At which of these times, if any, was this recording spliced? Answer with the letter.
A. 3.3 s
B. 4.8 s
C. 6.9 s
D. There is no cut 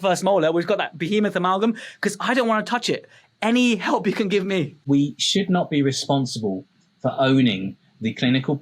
B